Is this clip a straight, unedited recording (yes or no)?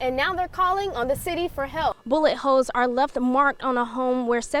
no